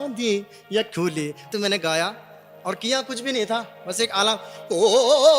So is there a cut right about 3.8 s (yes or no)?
no